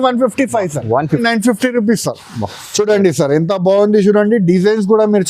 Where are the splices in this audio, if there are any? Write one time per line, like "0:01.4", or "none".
0:01.2